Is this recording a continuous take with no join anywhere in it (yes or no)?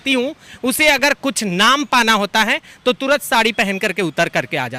yes